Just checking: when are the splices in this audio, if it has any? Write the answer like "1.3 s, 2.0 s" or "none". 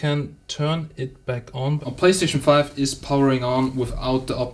1.8 s